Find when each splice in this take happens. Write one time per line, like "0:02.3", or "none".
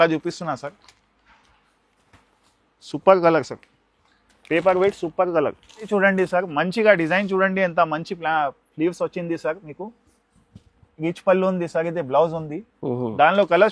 0:05.9